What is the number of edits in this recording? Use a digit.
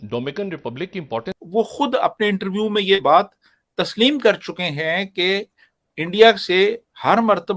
1